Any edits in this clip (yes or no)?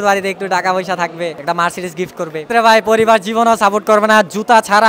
yes